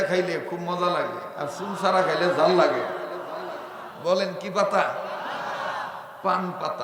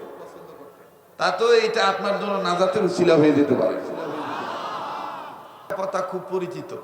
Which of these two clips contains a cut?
second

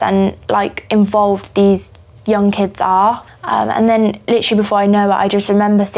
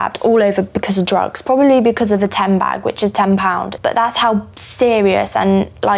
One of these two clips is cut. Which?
first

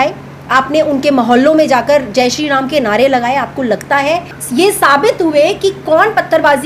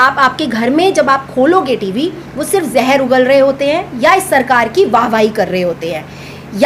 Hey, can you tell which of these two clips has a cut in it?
first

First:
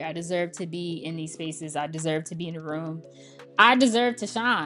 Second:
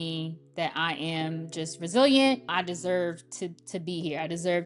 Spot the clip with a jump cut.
second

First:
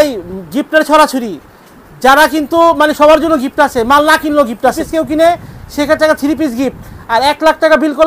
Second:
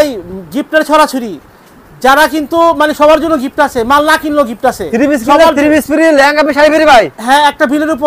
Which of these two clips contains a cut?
first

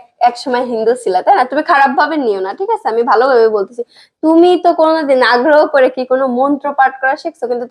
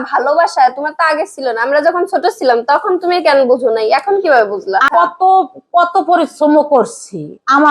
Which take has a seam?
second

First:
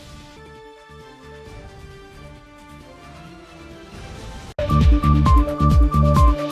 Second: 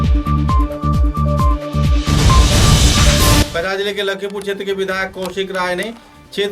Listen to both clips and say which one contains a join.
second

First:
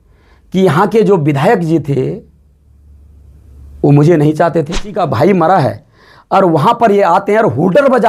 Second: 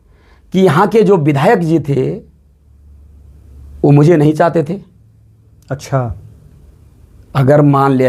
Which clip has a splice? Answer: first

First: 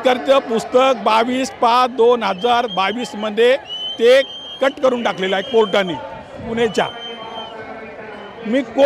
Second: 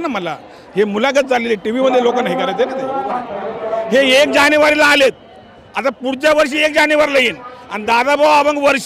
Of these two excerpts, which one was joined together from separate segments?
second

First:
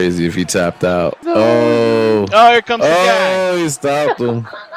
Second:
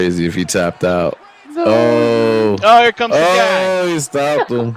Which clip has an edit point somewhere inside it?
first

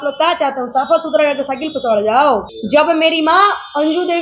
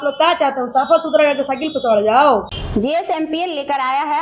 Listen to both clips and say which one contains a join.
first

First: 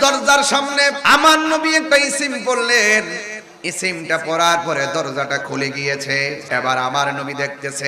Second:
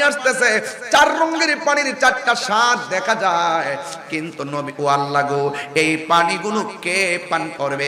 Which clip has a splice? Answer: first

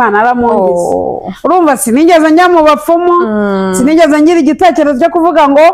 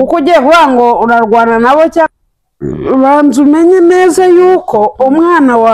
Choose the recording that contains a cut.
second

